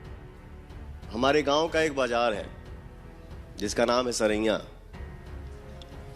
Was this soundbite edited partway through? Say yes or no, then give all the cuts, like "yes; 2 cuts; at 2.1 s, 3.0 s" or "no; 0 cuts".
yes; 1 cut; at 5.2 s